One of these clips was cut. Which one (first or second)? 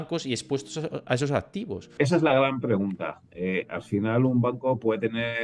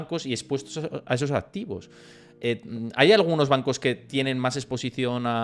first